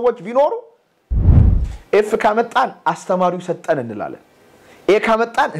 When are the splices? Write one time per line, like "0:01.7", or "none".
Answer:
0:01.4